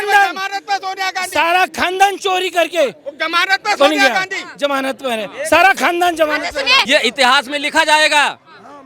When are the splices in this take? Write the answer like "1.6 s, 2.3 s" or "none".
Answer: 6.9 s